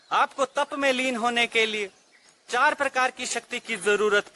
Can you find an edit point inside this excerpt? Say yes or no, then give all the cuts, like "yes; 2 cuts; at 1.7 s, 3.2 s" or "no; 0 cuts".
no; 0 cuts